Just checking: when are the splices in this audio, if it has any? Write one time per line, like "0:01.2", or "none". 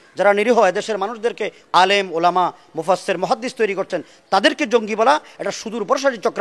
0:01.6